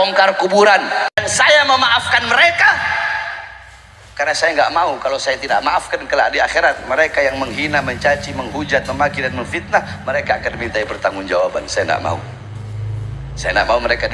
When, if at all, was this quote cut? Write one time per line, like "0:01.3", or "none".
0:01.2

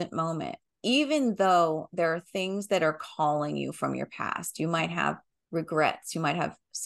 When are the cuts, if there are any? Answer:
0:05.3

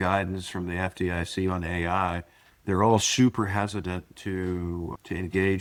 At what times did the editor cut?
none

